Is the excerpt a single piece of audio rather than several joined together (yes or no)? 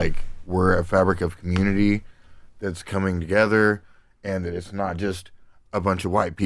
yes